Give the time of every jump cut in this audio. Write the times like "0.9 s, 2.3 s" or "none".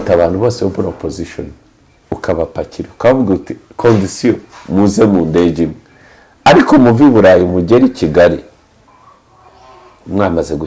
none

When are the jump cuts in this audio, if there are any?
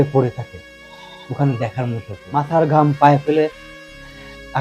2.2 s

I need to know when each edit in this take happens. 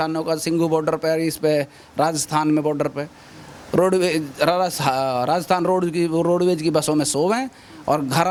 none

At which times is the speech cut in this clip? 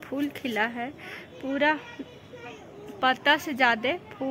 none

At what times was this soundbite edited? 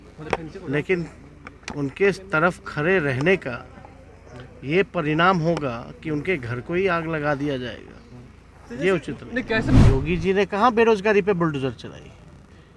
9.7 s

